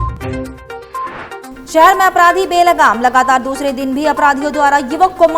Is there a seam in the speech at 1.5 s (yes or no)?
yes